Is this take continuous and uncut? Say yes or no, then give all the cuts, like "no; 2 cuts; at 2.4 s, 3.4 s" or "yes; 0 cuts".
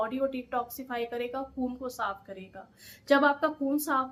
yes; 0 cuts